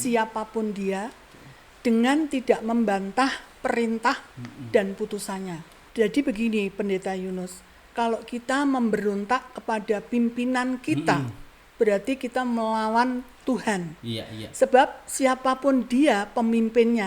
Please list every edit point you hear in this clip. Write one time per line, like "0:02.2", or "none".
0:05.8